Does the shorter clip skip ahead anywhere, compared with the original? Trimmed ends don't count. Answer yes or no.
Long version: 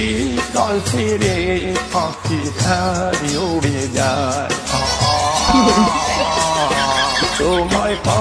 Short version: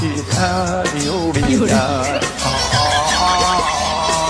no